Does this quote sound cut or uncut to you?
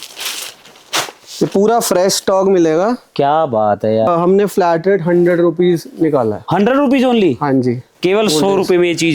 cut